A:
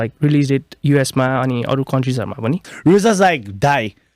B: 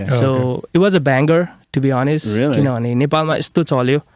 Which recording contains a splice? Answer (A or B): A